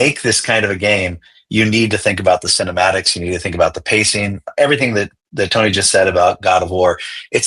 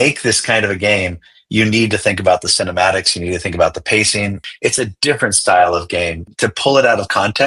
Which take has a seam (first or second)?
second